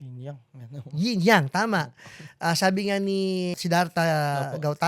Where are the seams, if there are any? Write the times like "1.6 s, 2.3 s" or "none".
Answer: 3.6 s